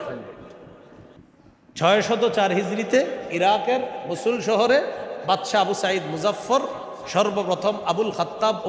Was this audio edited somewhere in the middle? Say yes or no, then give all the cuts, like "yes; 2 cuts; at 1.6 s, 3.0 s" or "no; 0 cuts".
yes; 1 cut; at 1.2 s